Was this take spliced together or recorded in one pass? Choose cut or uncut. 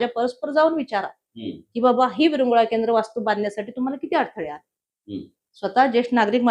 uncut